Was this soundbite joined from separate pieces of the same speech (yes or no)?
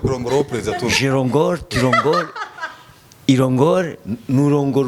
no